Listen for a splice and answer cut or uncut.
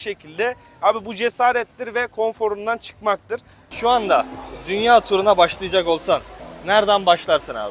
cut